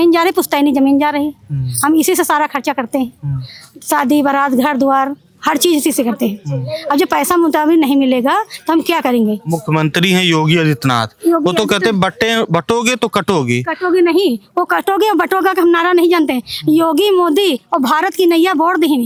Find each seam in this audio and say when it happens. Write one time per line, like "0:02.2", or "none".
none